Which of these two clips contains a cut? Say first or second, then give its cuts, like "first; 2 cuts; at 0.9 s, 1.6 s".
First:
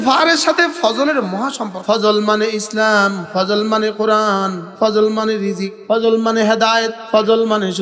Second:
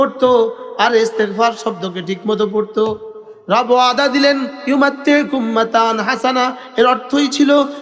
first; 5 cuts; at 1.7 s, 3.2 s, 4.6 s, 5.7 s, 7.0 s